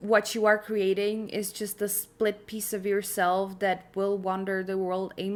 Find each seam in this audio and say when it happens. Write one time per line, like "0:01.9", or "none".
none